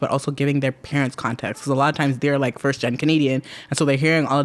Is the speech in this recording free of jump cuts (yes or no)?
yes